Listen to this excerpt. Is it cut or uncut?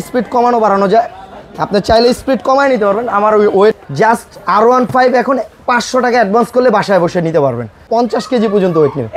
cut